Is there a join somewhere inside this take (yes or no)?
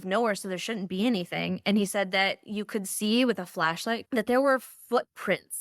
yes